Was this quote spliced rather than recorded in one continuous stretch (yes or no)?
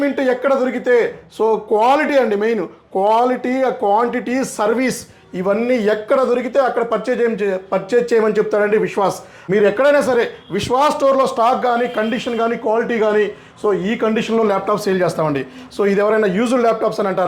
yes